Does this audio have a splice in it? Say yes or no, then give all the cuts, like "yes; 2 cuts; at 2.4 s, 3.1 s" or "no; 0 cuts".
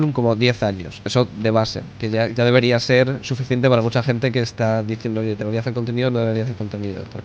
no; 0 cuts